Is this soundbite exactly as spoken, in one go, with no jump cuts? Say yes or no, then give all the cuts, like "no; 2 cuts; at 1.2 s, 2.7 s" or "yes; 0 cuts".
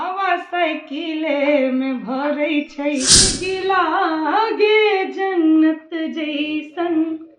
no; 1 cut; at 3.3 s